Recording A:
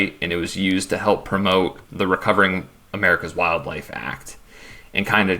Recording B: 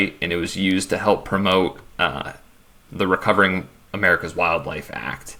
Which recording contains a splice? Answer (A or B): A